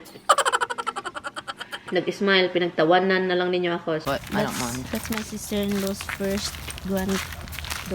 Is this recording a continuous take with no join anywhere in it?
no; 1 cut; at 4.0 s

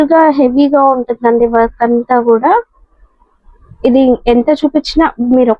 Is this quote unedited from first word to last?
yes; 0 cuts

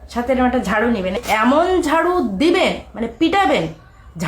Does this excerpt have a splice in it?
yes; 1 cut; at 1.2 s

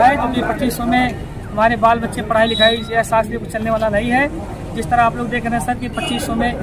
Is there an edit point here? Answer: no; 0 cuts

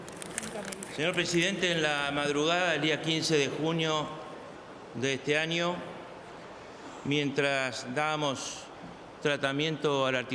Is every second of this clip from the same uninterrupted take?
yes; 0 cuts

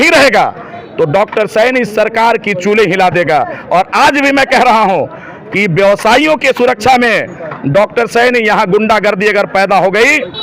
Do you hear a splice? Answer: no; 0 cuts

